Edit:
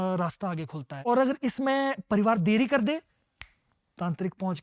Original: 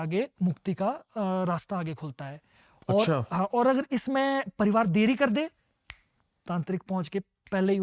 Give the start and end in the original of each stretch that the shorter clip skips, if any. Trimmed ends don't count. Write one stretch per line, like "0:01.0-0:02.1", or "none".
0:02.3-0:03.5